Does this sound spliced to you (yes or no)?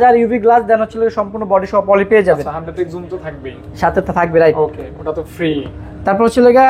no